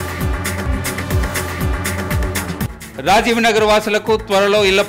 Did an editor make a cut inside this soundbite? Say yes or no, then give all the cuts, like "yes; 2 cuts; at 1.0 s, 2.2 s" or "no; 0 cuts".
yes; 1 cut; at 2.5 s